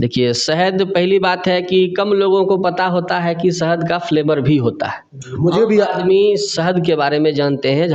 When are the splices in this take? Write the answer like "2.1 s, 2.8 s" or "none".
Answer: none